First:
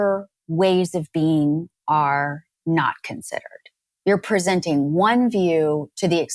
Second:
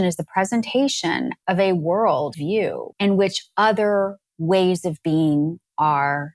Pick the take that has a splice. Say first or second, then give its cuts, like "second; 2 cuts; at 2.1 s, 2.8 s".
second; 2 cuts; at 1.3 s, 2.3 s